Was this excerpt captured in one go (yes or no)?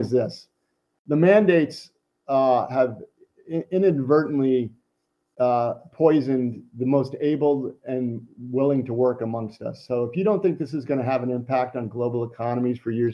yes